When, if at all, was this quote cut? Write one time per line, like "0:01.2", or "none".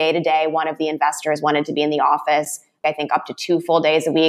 0:02.8